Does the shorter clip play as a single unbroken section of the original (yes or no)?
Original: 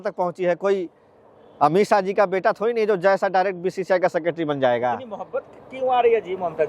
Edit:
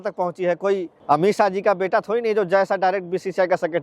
no